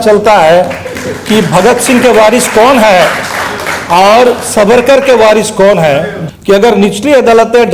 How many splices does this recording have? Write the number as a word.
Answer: one